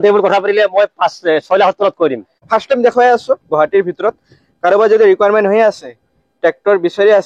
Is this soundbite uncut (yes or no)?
no